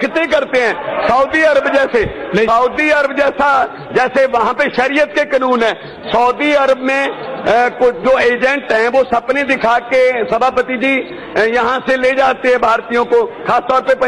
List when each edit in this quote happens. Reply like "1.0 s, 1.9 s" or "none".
none